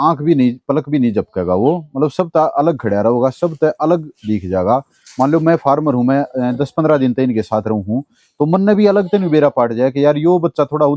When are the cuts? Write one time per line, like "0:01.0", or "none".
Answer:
none